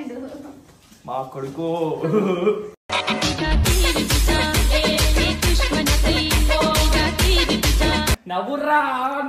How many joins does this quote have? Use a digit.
1